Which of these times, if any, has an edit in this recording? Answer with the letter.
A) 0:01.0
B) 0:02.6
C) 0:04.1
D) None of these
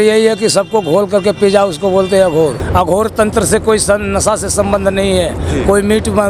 B